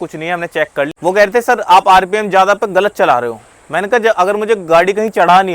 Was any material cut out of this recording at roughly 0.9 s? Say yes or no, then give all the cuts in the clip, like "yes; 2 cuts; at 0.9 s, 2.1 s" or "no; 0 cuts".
yes; 1 cut; at 0.9 s